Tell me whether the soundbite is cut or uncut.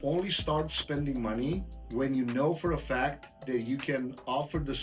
cut